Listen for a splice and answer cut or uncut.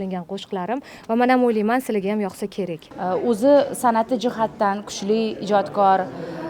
cut